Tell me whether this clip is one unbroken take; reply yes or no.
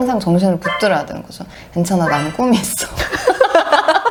yes